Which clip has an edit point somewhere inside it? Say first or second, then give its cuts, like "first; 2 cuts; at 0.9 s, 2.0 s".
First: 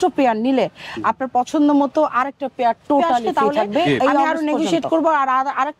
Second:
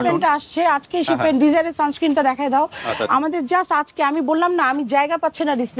first; 1 cut; at 4.3 s